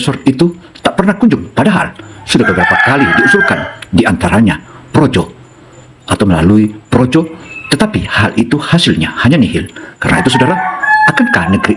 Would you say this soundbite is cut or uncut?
uncut